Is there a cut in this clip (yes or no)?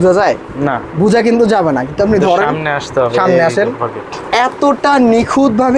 no